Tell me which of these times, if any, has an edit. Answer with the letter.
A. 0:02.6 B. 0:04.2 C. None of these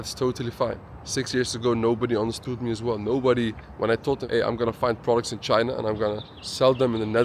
B